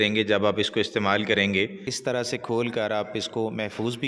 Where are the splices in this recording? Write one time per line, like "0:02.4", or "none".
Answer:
0:01.9